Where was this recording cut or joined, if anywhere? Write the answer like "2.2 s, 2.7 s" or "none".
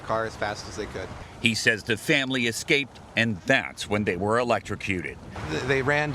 4.8 s